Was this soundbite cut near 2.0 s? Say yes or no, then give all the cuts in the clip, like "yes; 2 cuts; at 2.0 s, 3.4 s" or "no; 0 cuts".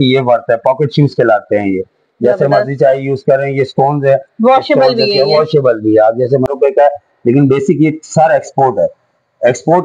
no; 1 cut; at 6.5 s